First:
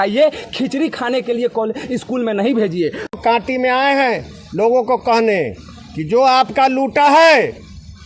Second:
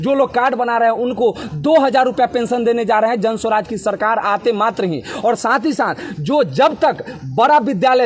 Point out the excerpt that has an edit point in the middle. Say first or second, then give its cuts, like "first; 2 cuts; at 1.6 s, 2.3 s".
first; 1 cut; at 3.1 s